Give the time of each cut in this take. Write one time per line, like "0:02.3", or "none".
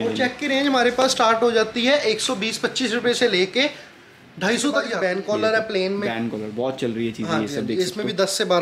0:04.9